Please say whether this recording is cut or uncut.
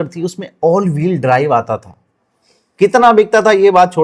uncut